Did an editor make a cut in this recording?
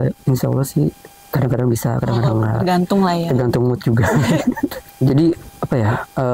yes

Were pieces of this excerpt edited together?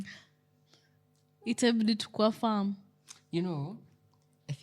no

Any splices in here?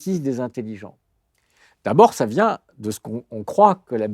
no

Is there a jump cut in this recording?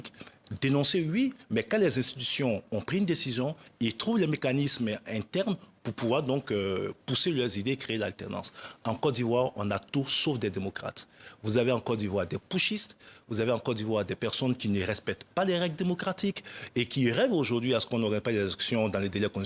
no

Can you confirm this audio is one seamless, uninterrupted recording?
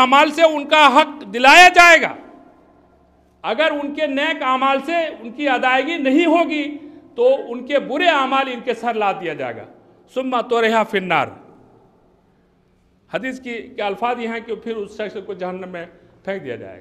yes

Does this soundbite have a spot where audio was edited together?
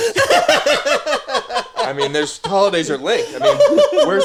no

